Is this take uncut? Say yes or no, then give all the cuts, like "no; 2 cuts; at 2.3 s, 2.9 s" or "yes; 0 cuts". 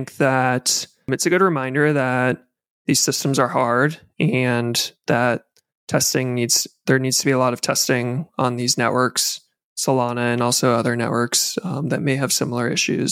no; 1 cut; at 1.1 s